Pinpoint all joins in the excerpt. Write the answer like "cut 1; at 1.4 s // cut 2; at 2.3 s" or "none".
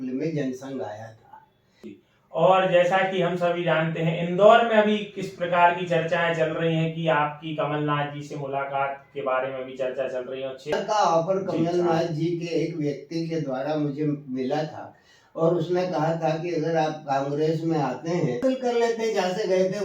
cut 1; at 2.0 s // cut 2; at 10.7 s // cut 3; at 18.4 s